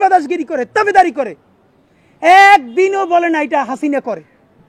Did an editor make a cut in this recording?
no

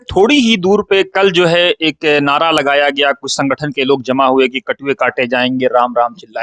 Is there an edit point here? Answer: no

